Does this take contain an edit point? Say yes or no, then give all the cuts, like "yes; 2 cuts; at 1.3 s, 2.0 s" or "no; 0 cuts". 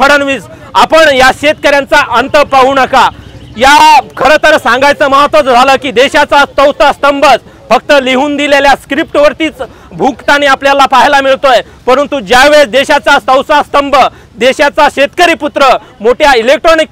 no; 0 cuts